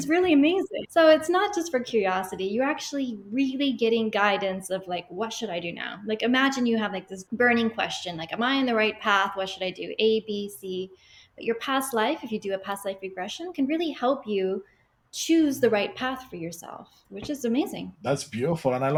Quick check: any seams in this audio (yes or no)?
no